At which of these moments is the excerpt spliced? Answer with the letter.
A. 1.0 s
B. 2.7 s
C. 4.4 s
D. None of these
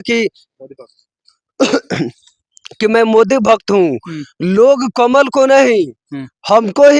D